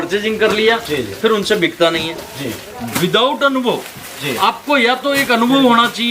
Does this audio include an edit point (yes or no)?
no